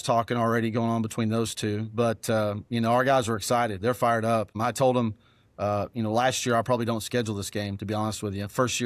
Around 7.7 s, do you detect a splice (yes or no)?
no